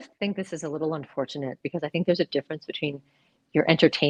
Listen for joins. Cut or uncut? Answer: uncut